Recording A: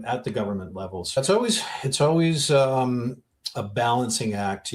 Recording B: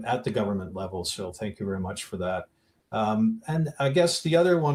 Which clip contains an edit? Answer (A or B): A